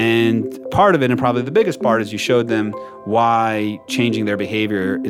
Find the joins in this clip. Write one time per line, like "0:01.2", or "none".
none